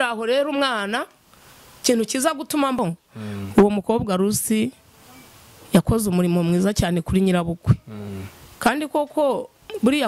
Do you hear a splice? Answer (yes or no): yes